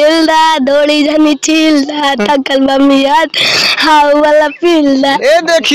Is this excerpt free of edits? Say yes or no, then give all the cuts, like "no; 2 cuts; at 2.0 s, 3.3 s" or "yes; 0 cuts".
yes; 0 cuts